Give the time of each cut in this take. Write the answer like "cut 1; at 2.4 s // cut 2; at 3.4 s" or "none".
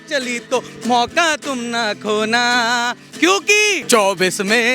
cut 1; at 3.8 s

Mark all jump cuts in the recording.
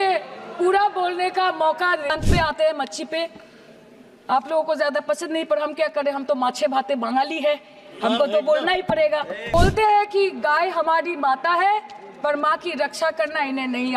cut 1; at 2.1 s // cut 2; at 9.5 s

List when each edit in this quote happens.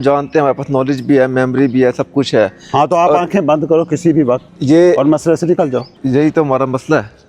cut 1; at 4.5 s // cut 2; at 5.9 s

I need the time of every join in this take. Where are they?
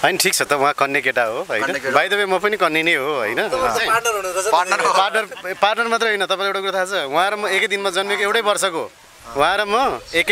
none

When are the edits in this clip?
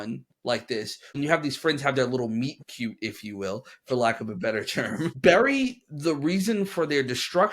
cut 1; at 1.0 s

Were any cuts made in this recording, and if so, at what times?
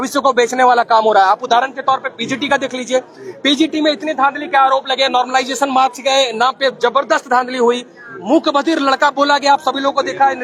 none

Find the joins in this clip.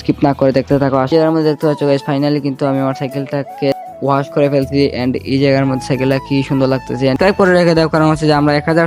cut 1; at 1.1 s // cut 2; at 7.1 s

